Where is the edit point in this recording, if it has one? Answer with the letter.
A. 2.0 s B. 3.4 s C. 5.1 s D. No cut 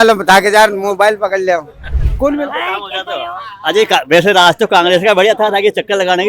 A